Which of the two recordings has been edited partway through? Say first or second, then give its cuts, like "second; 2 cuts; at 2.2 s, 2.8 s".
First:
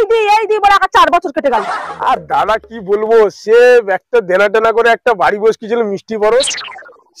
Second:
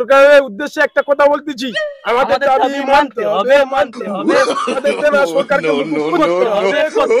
first; 1 cut; at 1.8 s